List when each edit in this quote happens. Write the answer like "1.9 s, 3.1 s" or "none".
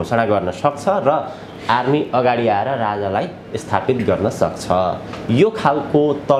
none